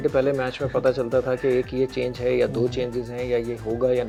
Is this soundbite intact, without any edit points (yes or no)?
yes